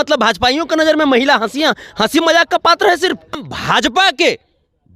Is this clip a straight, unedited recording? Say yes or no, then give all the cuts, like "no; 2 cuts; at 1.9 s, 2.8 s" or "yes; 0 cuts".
no; 1 cut; at 3.4 s